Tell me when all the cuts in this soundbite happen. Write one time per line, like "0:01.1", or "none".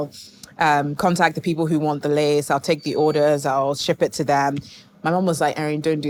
none